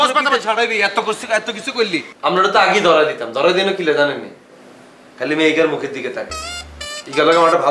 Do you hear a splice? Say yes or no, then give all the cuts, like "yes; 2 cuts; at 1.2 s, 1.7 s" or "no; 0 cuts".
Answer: yes; 1 cut; at 2.0 s